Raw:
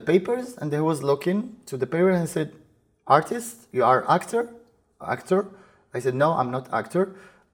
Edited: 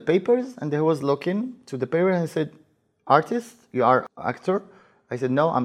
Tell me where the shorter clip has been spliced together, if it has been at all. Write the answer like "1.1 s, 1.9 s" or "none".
4.0 s